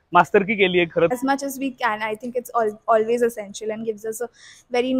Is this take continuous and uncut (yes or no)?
no